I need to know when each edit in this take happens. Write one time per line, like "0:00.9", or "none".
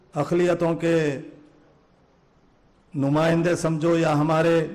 0:01.1